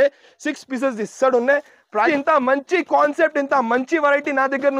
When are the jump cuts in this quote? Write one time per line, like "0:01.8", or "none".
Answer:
0:02.1